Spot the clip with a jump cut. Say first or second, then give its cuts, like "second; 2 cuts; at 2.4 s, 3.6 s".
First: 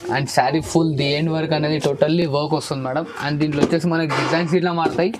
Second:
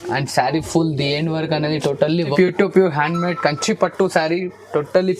second; 1 cut; at 2.3 s